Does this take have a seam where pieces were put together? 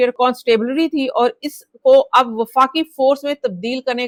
no; 0 cuts

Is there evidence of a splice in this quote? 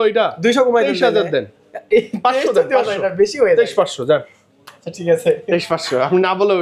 no; 0 cuts

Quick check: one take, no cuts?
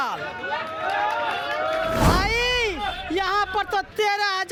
yes; 0 cuts

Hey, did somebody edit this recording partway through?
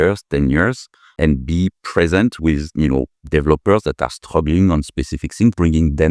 yes; 1 cut; at 1.2 s

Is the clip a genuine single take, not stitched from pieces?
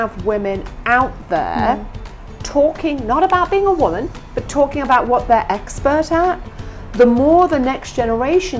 yes; 0 cuts

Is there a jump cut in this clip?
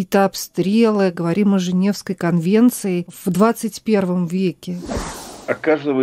yes; 2 cuts; at 3.1 s, 5.0 s

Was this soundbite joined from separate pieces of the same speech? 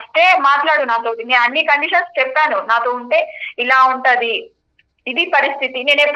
no; 0 cuts

